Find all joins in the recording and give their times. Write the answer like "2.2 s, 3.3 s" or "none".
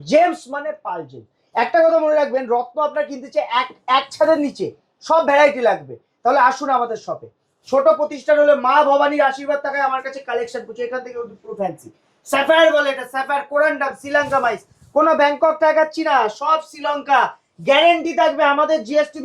none

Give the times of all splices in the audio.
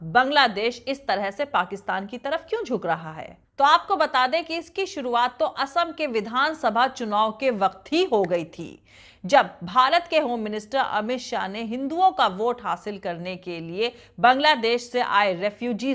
none

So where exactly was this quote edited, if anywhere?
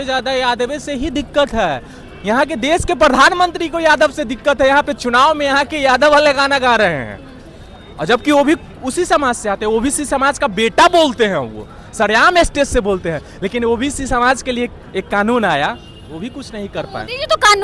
none

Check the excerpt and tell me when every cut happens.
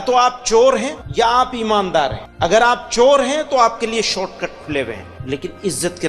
0.9 s, 2.2 s, 5.1 s

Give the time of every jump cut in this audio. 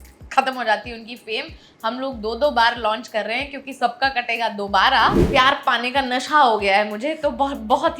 5.2 s

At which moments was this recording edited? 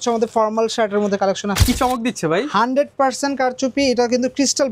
1.6 s

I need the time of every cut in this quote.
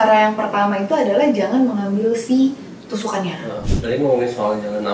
3.7 s

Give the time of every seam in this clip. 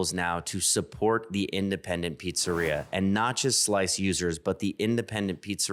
none

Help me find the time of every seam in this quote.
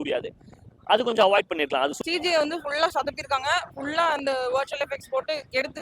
2.0 s

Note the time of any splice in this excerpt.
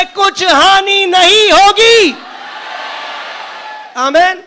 none

